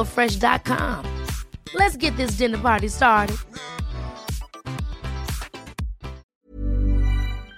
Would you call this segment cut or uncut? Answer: cut